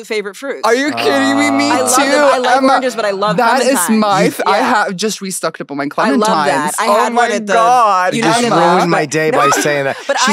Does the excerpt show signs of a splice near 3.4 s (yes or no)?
no